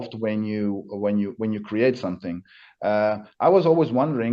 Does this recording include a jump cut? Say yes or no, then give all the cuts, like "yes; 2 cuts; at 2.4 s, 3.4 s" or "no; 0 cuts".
no; 0 cuts